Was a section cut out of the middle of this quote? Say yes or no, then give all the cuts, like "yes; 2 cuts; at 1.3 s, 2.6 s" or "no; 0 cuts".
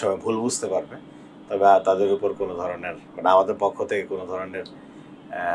no; 0 cuts